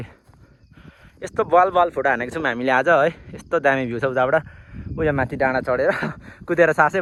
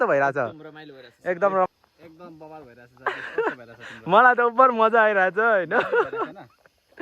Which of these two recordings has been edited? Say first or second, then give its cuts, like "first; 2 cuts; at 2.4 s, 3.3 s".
second; 1 cut; at 1.7 s